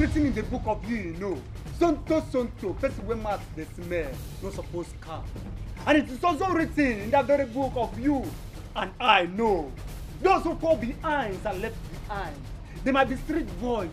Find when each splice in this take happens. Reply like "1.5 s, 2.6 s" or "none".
none